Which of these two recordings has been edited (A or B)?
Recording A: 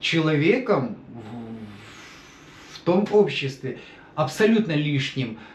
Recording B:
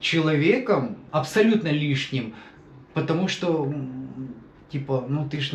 B